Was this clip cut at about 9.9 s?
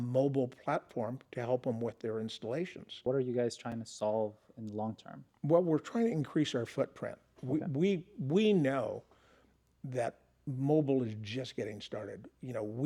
no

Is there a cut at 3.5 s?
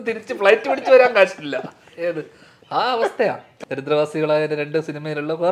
yes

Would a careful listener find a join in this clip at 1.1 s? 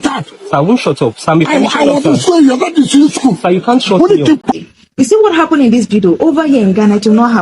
no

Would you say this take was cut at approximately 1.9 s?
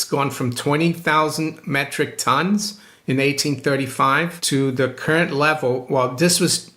no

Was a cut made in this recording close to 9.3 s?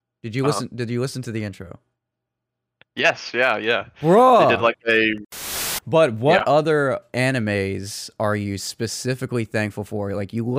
no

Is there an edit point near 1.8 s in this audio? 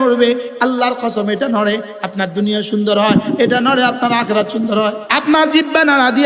no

